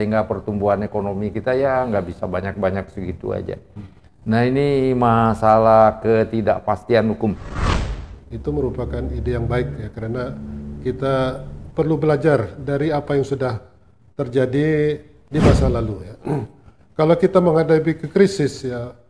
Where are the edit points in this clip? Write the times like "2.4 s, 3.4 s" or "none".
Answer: 7.6 s